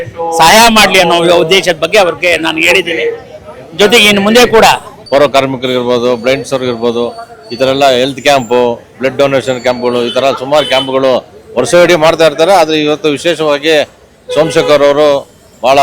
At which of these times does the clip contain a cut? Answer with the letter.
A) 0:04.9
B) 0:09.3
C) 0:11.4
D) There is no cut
A